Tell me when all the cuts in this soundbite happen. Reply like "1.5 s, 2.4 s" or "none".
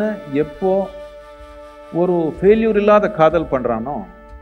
none